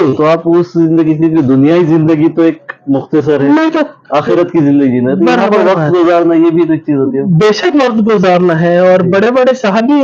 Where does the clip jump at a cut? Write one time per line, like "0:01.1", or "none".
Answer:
none